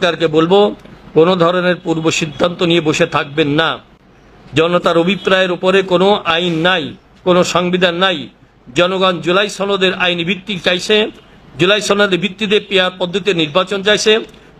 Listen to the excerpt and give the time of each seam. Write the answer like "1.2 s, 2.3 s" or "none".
none